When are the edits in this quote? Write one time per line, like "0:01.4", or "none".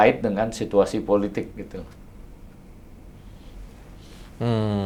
none